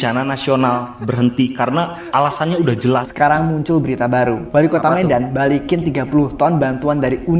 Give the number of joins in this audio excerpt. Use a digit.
1